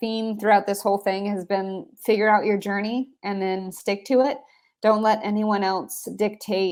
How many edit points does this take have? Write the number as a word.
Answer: zero